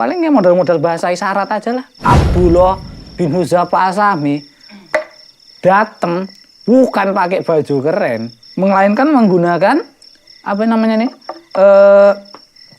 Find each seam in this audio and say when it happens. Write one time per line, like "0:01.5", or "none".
0:01.9